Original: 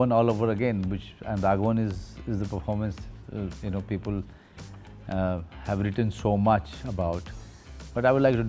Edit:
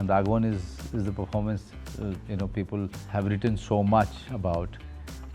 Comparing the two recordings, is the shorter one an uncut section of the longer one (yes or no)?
no